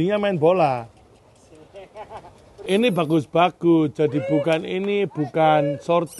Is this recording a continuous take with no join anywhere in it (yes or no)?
no